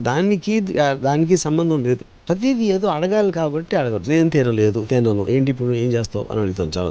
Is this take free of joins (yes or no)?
no